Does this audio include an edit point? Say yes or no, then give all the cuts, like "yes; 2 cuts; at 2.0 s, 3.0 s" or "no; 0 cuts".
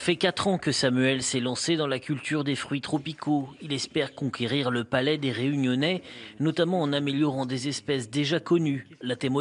no; 0 cuts